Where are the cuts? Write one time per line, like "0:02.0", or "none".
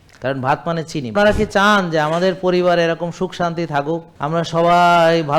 0:01.1
0:04.1

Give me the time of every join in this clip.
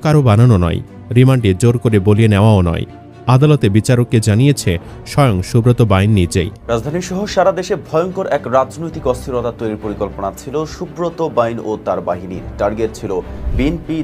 0:06.6

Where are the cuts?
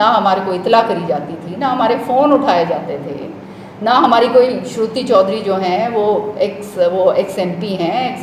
none

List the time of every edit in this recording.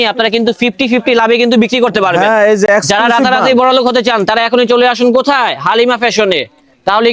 none

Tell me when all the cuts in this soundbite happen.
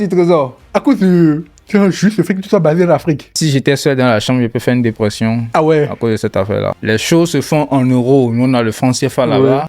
0:03.4
0:06.8

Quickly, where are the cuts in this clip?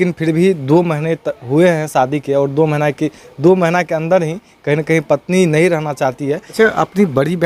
0:06.5

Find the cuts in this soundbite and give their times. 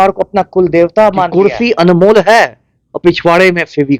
0:01.3

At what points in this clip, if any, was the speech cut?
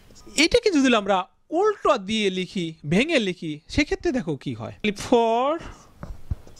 0:04.8

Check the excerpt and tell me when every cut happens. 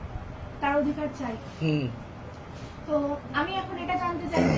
none

